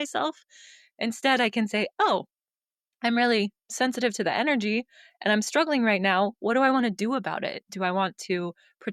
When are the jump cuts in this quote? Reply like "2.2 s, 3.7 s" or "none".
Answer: none